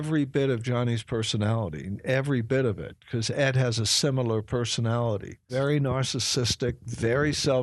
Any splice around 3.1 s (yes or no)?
no